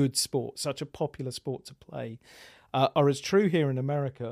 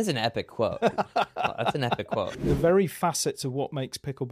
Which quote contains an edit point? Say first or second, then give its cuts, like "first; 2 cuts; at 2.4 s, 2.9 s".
second; 1 cut; at 2.4 s